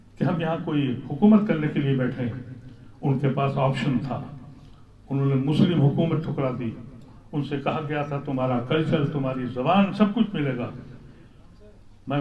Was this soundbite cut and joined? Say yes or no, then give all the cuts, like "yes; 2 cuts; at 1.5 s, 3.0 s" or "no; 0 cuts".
no; 0 cuts